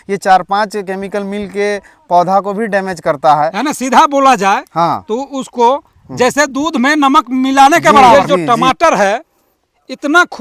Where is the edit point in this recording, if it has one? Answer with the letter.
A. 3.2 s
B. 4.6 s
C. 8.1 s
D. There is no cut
C